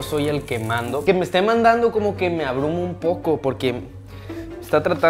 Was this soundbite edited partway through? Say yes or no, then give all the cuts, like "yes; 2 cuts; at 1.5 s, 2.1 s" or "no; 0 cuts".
yes; 1 cut; at 1.0 s